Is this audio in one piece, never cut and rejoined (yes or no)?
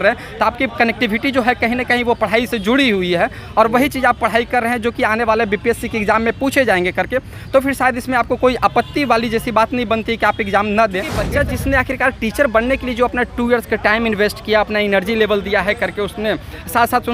no